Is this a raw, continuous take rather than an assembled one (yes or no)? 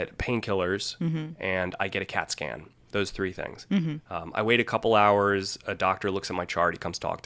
yes